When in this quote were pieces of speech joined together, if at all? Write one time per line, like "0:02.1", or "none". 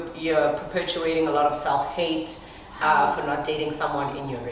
none